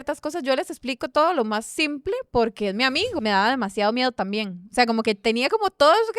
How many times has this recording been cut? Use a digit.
1